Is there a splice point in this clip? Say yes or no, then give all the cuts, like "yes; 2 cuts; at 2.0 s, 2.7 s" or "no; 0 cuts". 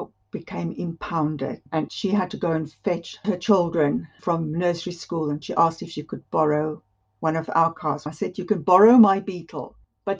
yes; 3 cuts; at 1.9 s, 5.4 s, 8.0 s